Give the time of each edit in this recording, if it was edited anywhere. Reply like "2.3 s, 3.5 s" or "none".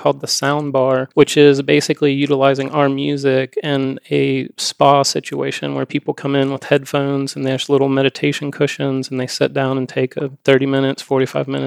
1.1 s